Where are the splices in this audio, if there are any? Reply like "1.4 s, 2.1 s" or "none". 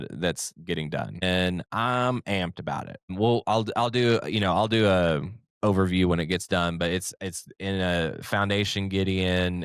1.2 s, 3.1 s

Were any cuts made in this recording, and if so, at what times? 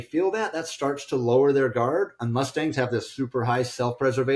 none

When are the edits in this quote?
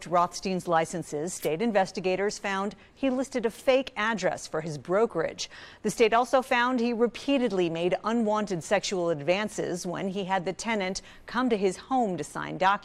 none

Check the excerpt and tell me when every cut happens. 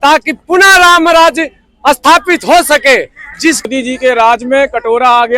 3.7 s

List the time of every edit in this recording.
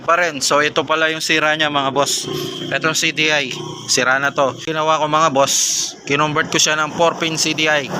4.6 s

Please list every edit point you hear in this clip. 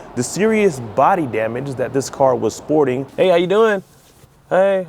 3.1 s

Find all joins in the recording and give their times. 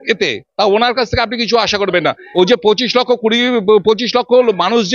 2.2 s

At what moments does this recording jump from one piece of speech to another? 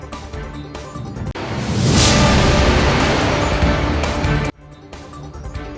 none

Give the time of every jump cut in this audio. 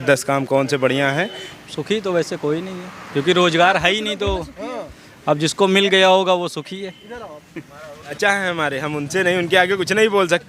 1.4 s, 8.1 s

